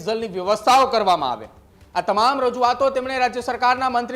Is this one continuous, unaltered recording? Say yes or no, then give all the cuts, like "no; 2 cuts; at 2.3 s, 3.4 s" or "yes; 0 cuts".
yes; 0 cuts